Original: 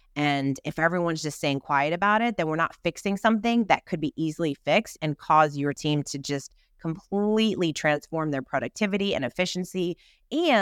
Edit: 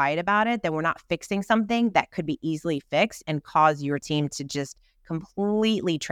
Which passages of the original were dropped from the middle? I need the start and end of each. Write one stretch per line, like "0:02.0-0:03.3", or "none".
none